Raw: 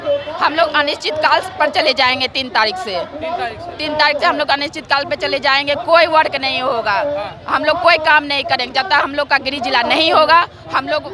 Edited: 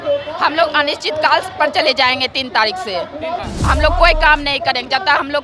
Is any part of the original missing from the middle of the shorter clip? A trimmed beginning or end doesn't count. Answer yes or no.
yes